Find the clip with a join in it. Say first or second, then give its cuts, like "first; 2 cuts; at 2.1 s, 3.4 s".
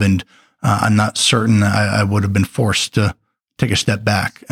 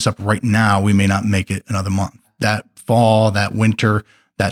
second; 1 cut; at 2.2 s